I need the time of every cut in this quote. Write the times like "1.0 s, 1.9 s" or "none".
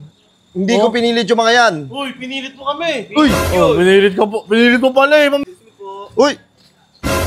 5.4 s